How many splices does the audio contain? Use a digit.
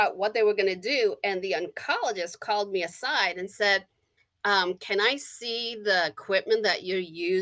0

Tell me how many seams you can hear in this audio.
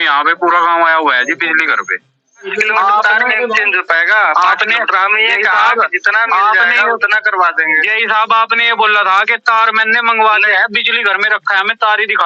1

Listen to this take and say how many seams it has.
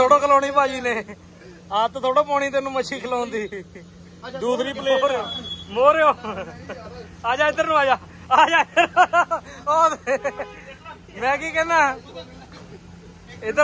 1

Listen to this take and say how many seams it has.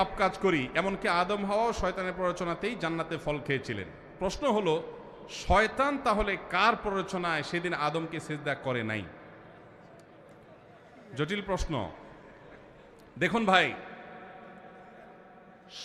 0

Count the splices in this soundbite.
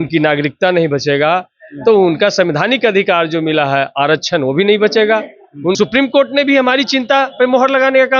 1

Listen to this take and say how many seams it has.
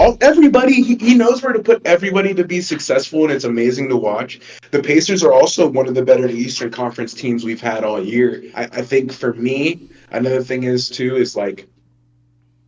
1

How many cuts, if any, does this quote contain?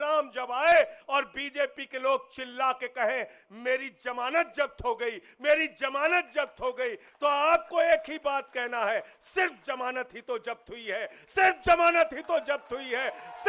0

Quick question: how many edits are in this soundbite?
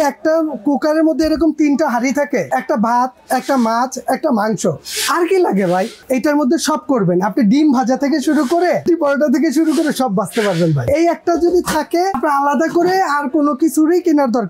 5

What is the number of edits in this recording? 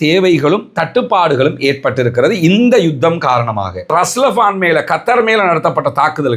1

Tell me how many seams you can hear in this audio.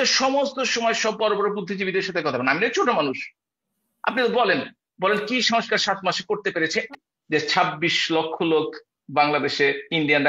1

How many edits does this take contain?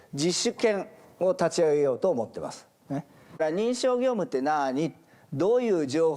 1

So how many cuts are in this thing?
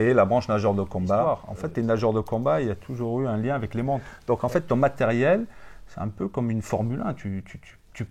2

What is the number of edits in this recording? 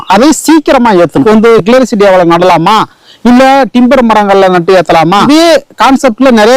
2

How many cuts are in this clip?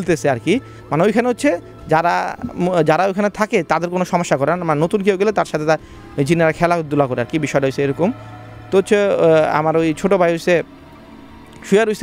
0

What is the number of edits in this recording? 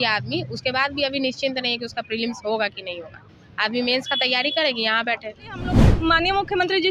1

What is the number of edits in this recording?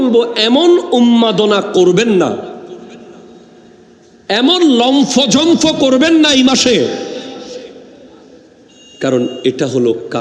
0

